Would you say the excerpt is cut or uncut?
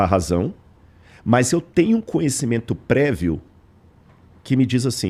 uncut